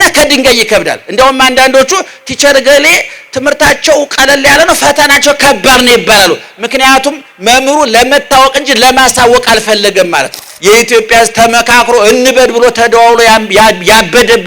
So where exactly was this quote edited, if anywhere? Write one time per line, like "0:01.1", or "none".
0:10.5

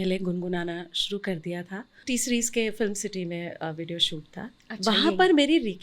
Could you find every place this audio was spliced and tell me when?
0:02.0

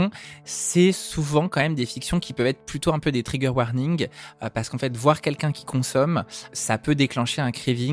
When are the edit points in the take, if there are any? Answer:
0:06.6

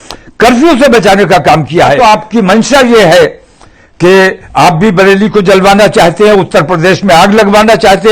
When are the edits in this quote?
0:02.0

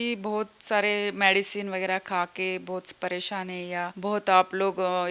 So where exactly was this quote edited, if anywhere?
0:03.9

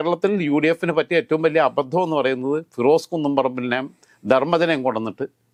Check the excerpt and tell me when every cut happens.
none

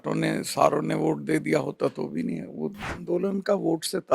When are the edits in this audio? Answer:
0:02.9

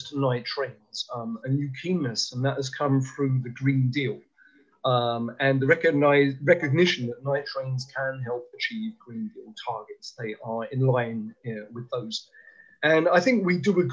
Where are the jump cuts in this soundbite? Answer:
none

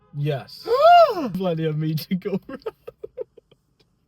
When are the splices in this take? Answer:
0:01.4

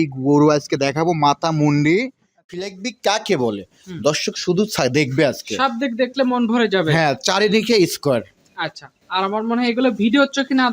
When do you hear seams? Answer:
0:02.5

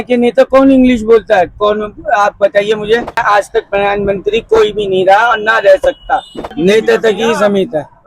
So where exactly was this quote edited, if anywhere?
0:03.2
0:06.5

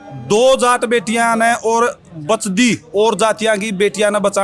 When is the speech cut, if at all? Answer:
none

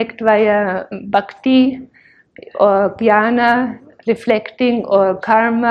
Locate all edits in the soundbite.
none

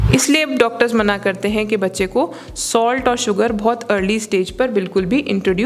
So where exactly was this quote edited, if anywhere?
none

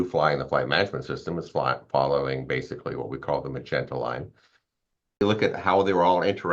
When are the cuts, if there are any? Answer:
0:05.2

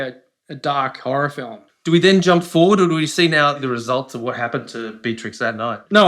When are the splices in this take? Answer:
0:03.6

